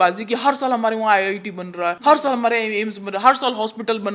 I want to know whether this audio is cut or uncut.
cut